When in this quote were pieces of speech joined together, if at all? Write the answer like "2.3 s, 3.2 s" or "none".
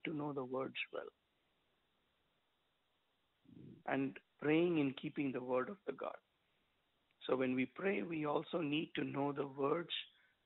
none